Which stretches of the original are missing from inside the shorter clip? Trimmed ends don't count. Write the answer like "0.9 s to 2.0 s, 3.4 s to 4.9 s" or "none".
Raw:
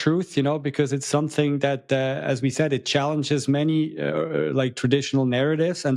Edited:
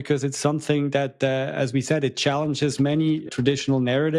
4.0 s to 4.7 s